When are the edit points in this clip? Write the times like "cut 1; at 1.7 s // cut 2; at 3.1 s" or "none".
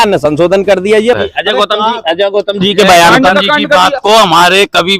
cut 1; at 1.2 s